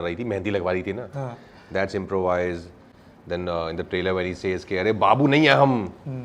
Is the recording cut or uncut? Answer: uncut